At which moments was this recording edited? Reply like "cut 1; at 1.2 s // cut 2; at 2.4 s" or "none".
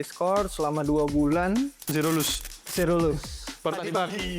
cut 1; at 1.8 s

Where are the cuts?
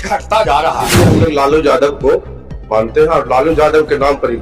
cut 1; at 0.9 s

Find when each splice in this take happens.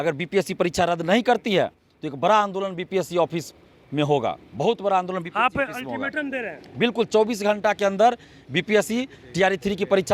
none

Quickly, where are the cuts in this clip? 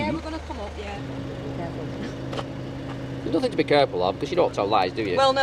cut 1; at 0.9 s

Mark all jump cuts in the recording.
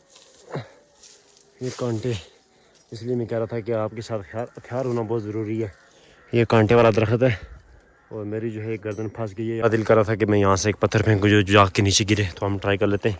cut 1; at 9.6 s

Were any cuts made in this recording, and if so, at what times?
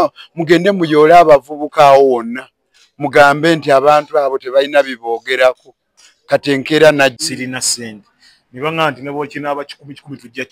cut 1; at 7.2 s

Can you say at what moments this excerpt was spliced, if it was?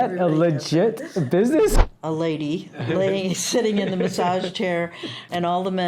cut 1; at 1.8 s

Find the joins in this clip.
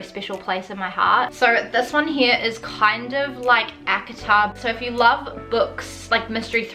cut 1; at 1.3 s // cut 2; at 4.6 s

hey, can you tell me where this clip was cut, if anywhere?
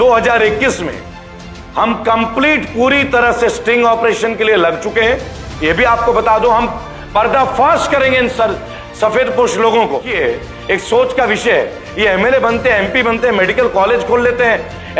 cut 1; at 10.1 s

